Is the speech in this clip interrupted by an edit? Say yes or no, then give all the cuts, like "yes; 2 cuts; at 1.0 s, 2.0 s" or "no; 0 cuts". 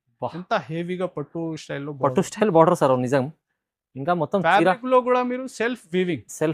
no; 0 cuts